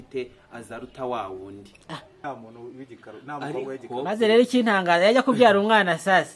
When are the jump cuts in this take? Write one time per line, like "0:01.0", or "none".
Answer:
0:02.1